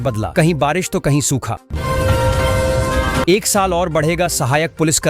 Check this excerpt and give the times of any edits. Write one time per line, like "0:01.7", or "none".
0:01.7
0:03.2